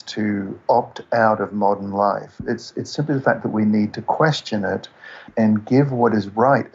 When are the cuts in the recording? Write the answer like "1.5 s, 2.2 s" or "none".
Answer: 2.4 s, 5.3 s